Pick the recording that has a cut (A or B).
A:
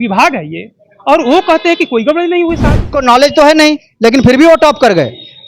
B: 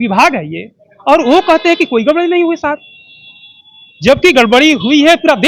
A